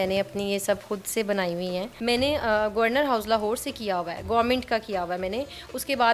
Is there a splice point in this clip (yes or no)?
yes